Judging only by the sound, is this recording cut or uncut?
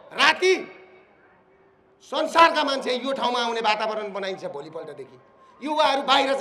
uncut